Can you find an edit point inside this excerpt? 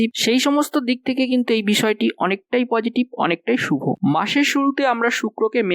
yes; 1 cut; at 4.0 s

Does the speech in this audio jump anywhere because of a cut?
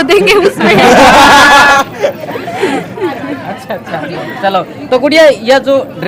no; 0 cuts

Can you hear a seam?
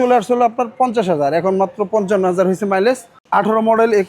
yes; 1 cut; at 3.1 s

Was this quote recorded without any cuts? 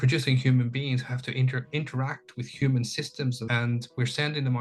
no; 1 cut; at 3.4 s

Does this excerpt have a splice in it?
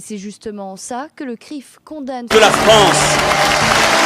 no; 0 cuts

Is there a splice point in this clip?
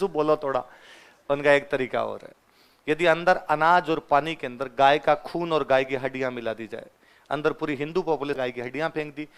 yes; 1 cut; at 8.4 s

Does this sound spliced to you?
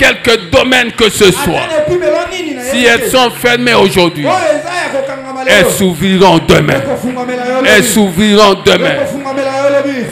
no; 0 cuts

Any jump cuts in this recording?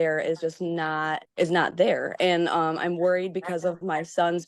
yes; 1 cut; at 1.3 s

